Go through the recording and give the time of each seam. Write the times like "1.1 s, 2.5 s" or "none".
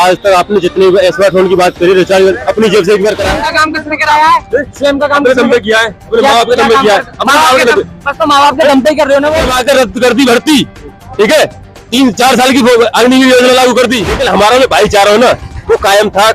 3.3 s, 9.5 s, 14.1 s